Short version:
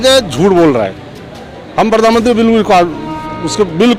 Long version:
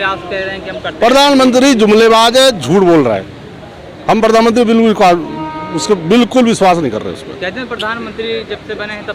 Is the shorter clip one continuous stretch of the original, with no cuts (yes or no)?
yes